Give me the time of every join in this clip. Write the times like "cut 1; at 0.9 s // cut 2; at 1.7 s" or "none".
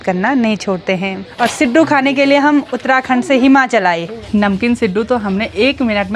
cut 1; at 1.2 s // cut 2; at 4.1 s